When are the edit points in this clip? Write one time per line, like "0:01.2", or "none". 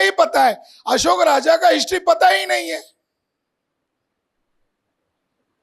none

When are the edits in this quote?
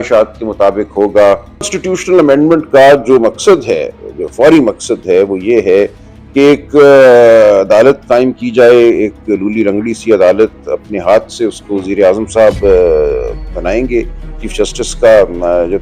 0:01.6

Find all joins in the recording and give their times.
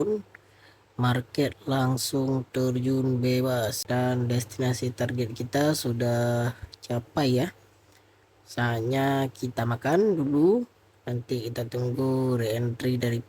0:03.8

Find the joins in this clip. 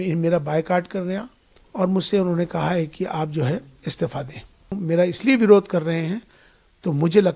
0:04.8

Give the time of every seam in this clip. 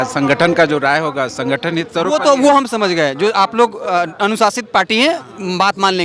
none

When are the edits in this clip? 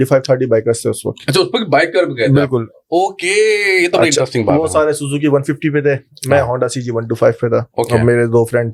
none

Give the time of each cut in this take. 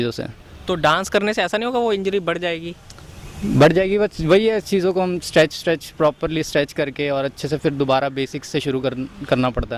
none

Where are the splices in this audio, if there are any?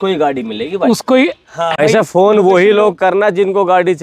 0:01.8

